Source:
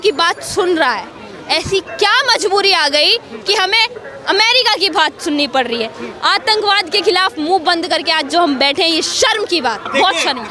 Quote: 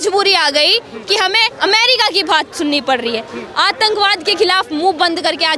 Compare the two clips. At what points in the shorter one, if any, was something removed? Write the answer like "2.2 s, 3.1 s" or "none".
1.5 s